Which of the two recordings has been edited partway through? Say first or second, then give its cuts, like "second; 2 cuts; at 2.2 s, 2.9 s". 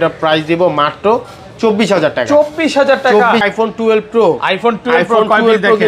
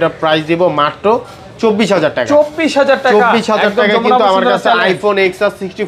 first; 1 cut; at 3.4 s